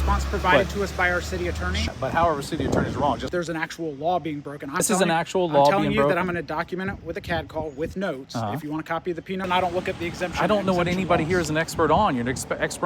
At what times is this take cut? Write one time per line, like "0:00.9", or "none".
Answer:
0:01.9
0:03.2
0:04.8
0:09.4